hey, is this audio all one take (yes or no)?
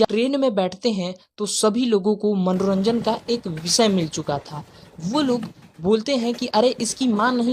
yes